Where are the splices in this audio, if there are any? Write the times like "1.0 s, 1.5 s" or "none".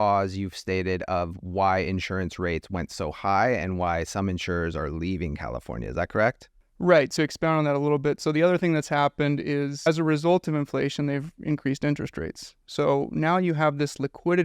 7.1 s, 9.9 s